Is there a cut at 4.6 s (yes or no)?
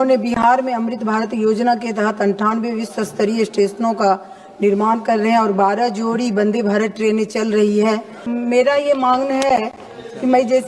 no